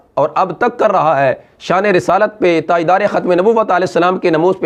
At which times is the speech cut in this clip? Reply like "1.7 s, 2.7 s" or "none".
none